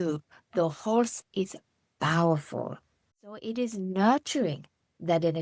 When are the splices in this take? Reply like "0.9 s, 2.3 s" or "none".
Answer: 3.3 s